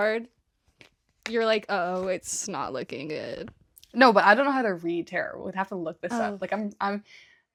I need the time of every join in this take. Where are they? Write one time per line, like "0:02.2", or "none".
none